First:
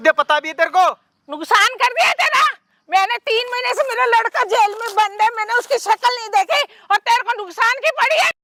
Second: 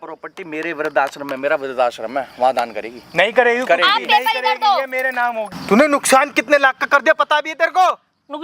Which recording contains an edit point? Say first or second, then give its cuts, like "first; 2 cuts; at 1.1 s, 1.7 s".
second; 1 cut; at 5.5 s